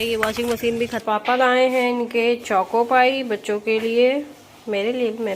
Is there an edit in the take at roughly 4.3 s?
no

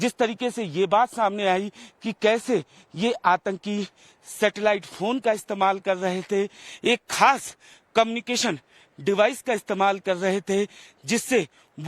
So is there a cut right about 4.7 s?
no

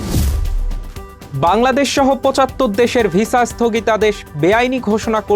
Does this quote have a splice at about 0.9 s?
yes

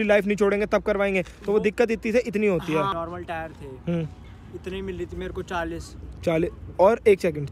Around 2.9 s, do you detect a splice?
yes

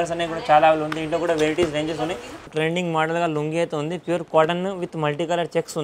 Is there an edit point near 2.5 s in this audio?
yes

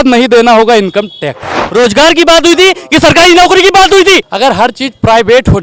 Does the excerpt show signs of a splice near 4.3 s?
yes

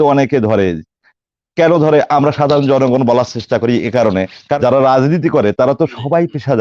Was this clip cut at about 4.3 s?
yes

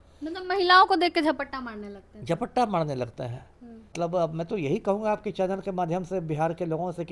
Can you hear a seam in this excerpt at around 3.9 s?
yes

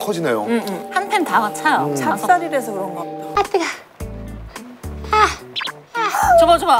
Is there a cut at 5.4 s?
no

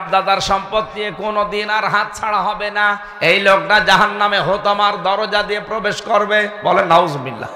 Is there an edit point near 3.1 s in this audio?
yes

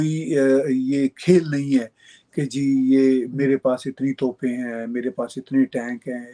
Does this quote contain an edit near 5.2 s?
no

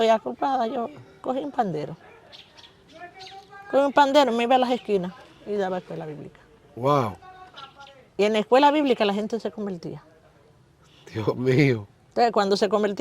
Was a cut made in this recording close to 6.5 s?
no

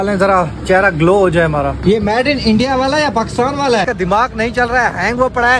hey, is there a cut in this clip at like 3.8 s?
yes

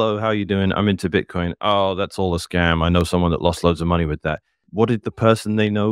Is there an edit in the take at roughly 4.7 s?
yes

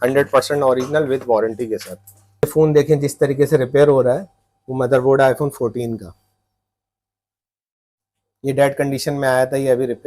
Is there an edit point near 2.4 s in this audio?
yes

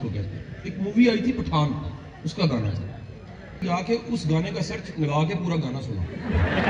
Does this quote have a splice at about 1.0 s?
no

